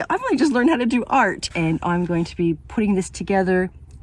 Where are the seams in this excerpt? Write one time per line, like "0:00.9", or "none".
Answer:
0:01.5